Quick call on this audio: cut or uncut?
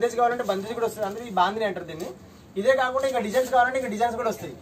uncut